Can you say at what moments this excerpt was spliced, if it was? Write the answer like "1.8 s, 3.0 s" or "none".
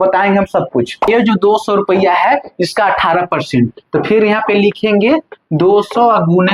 1.1 s